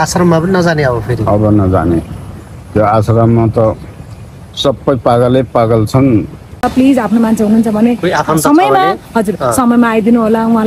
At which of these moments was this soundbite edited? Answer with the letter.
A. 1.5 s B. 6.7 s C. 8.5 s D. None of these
B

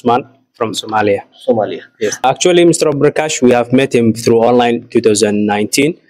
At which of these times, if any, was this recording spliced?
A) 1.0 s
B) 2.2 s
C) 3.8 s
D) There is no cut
B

